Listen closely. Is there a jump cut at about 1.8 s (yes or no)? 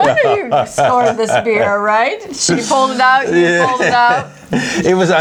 no